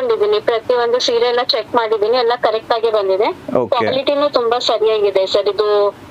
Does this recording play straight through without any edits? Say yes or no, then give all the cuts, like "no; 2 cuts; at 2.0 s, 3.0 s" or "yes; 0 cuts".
yes; 0 cuts